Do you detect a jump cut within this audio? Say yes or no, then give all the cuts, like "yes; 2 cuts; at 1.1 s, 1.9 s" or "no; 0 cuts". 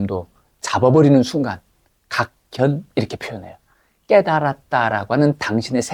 no; 0 cuts